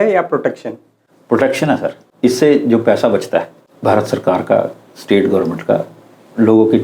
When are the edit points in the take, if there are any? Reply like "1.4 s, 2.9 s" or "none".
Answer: 2.0 s, 3.6 s